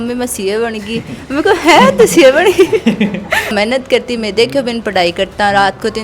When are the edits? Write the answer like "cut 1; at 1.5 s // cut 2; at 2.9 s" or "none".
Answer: cut 1; at 3.5 s